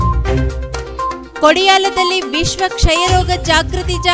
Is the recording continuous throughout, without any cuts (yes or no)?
yes